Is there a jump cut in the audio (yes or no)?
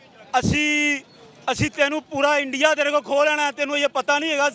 no